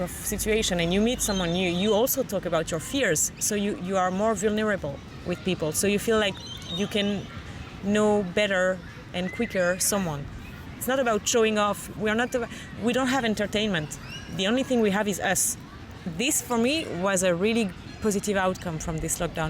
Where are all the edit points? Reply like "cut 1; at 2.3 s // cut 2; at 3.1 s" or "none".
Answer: cut 1; at 10.8 s // cut 2; at 15.8 s